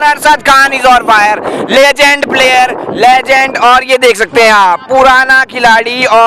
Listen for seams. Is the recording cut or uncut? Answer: uncut